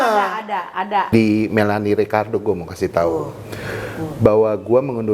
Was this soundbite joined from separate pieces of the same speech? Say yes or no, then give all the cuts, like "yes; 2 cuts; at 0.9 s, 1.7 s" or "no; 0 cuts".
yes; 1 cut; at 1.1 s